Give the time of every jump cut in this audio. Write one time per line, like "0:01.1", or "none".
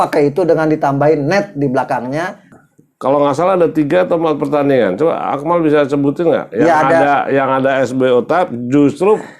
0:02.4